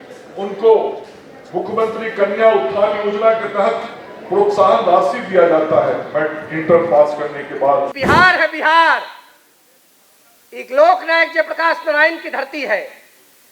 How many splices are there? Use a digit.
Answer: 1